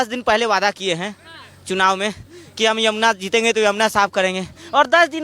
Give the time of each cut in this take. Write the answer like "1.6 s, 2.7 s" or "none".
none